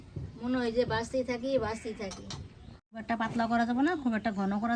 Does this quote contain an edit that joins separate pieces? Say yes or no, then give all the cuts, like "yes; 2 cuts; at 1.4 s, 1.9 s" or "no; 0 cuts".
yes; 1 cut; at 3.0 s